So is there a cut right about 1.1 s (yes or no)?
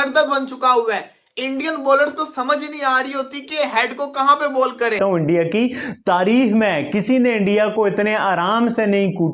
no